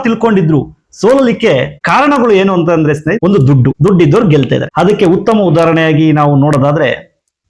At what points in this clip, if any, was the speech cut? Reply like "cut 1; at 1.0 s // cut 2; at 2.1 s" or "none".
cut 1; at 1.8 s // cut 2; at 3.6 s // cut 3; at 4.7 s